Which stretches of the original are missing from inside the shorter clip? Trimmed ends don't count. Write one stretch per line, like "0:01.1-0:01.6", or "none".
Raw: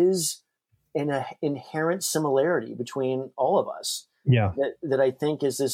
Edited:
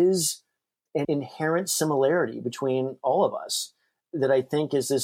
0:01.0-0:01.4
0:04.3-0:04.7